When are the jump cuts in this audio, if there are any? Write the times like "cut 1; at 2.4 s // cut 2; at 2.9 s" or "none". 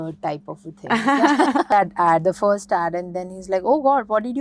cut 1; at 1.7 s